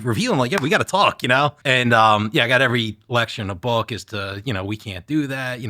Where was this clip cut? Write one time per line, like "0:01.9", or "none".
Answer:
0:01.6